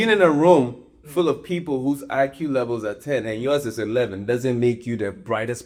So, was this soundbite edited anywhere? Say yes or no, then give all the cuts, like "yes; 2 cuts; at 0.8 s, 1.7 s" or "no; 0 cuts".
no; 0 cuts